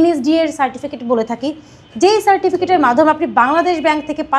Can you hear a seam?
no; 0 cuts

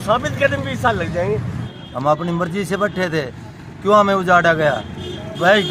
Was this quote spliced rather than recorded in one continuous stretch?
yes; 1 cut; at 1.6 s

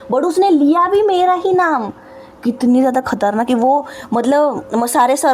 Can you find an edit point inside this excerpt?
no; 0 cuts

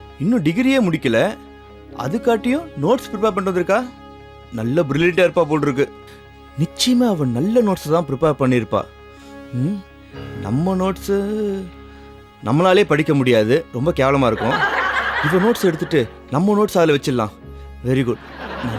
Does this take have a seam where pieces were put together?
no; 0 cuts

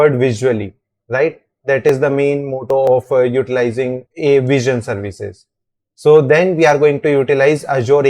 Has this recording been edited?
yes; 1 cut; at 4.0 s

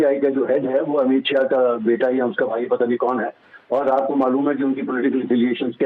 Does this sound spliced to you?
no; 0 cuts

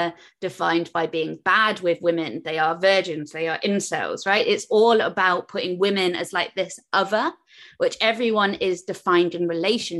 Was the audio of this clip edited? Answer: no; 0 cuts

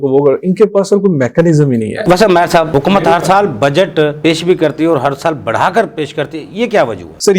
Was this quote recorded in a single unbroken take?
yes; 0 cuts

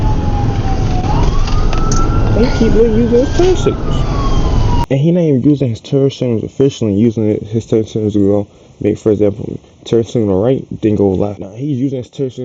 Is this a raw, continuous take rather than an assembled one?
no; 2 cuts; at 4.8 s, 11.5 s

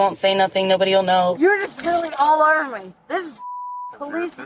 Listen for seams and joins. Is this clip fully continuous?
no; 1 cut; at 1.4 s

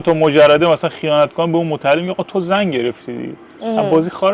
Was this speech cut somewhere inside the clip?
no; 0 cuts

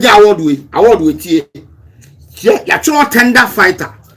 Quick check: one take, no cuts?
yes; 0 cuts

